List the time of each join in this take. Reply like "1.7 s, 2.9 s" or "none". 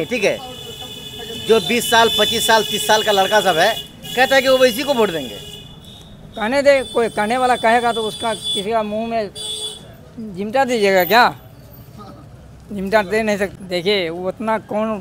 13.5 s